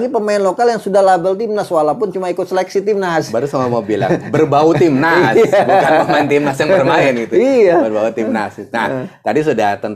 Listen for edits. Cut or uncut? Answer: uncut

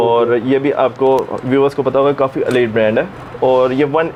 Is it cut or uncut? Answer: uncut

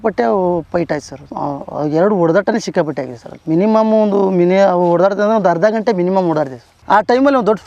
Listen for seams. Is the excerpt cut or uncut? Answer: cut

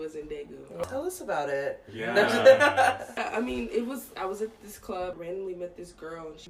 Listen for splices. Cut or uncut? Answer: uncut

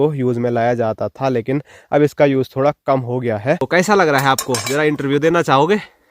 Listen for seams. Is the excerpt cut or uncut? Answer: cut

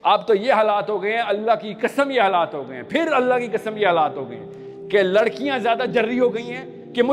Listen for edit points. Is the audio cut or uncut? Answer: uncut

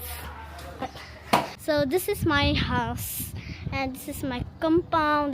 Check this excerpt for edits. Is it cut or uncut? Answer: cut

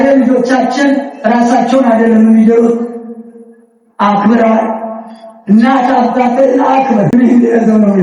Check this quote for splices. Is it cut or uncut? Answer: cut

